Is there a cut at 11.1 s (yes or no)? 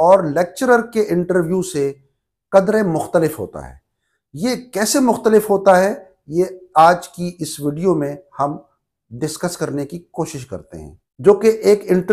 yes